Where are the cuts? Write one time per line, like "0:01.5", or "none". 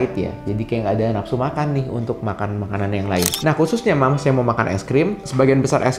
0:03.4